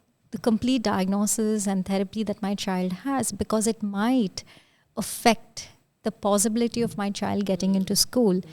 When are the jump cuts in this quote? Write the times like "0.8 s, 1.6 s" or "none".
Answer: none